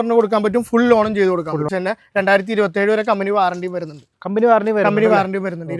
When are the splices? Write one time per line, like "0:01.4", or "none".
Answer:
0:01.7

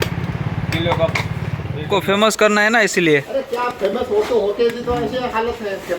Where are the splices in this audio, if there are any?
0:01.7

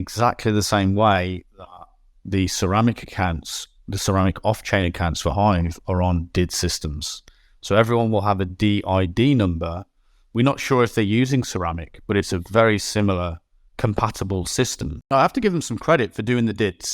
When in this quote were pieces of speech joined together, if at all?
0:15.1

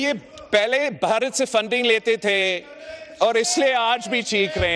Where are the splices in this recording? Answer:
none

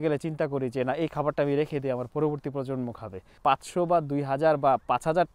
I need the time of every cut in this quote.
0:03.3

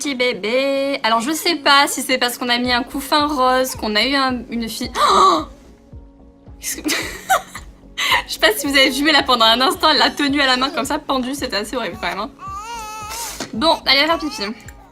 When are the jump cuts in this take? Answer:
0:09.1

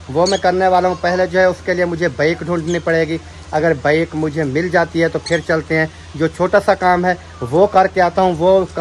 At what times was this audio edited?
none

